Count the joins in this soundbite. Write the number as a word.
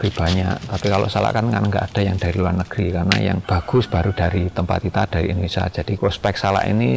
two